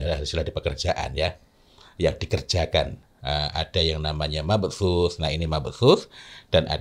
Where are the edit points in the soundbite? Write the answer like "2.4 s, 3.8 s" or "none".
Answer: none